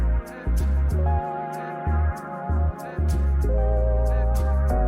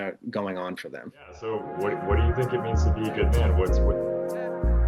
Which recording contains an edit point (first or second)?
second